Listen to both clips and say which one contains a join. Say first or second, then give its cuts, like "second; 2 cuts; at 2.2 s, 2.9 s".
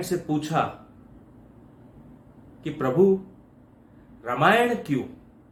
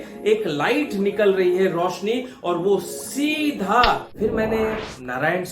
second; 1 cut; at 4.1 s